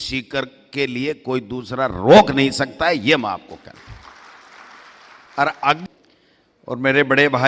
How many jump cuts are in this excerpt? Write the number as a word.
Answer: one